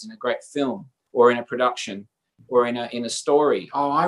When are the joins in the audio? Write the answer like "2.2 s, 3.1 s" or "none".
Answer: 0.9 s